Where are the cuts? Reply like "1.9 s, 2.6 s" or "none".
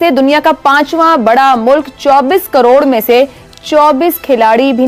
none